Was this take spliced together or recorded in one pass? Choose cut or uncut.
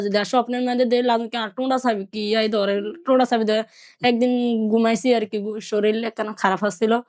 uncut